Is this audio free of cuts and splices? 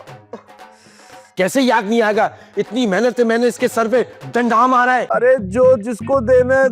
no; 1 cut; at 5.1 s

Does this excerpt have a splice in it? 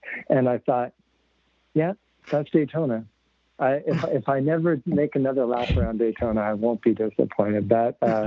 no; 0 cuts

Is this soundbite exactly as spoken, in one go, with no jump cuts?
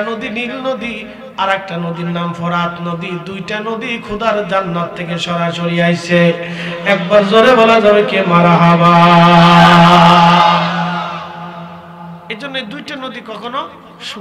yes; 0 cuts

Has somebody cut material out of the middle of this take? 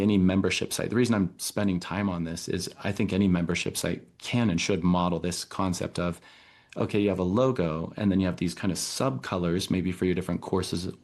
no; 0 cuts

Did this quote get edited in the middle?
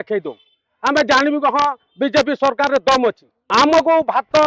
yes; 1 cut; at 3.3 s

